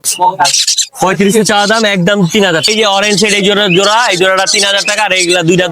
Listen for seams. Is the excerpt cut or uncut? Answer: cut